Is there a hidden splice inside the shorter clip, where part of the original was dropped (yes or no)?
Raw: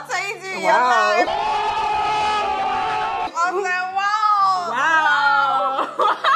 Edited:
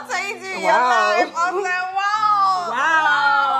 yes